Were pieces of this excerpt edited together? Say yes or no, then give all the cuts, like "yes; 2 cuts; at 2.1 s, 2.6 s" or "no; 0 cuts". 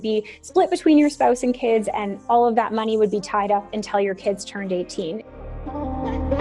yes; 1 cut; at 5.2 s